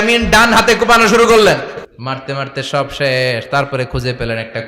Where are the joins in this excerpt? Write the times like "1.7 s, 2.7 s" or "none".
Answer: 1.9 s